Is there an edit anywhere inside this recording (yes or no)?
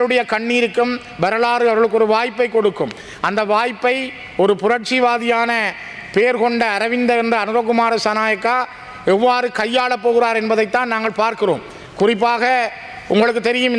no